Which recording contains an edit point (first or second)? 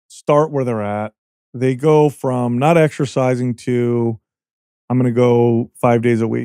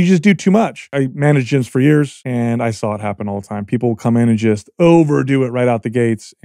second